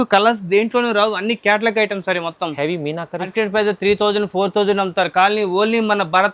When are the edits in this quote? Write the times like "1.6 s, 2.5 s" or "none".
3.3 s

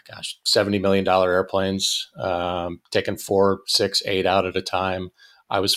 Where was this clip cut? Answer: none

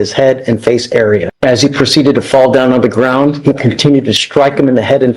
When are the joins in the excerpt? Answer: 1.3 s

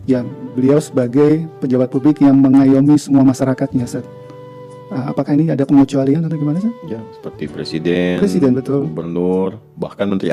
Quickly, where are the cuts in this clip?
none

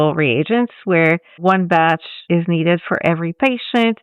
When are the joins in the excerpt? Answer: 1.4 s

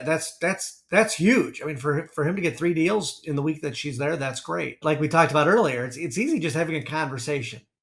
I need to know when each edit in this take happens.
4.8 s

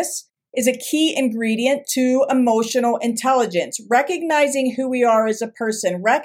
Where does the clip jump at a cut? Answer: none

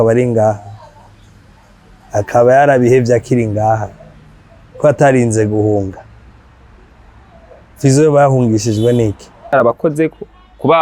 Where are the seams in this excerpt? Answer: 9.5 s

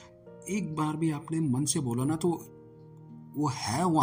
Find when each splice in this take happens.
none

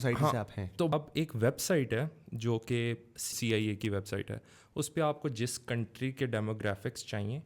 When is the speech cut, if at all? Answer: 0.9 s, 3.3 s

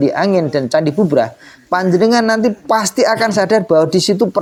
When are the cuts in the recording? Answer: none

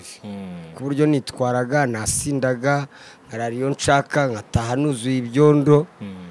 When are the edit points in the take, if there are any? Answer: none

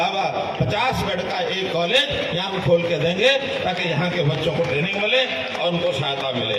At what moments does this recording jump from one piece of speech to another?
none

